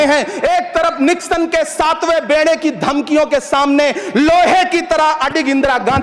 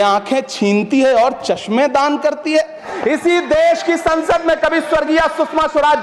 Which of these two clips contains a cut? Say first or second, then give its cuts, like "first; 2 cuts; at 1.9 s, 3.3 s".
second; 1 cut; at 2.9 s